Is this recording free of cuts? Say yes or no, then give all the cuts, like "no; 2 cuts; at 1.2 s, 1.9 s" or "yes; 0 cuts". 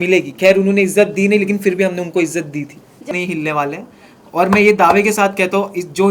no; 1 cut; at 3.1 s